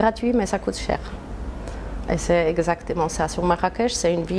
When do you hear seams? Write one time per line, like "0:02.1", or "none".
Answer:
none